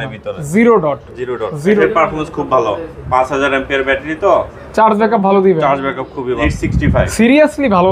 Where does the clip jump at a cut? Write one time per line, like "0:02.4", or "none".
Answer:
0:01.8
0:06.5